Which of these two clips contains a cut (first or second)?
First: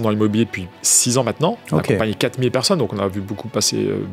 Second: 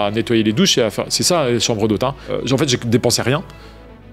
second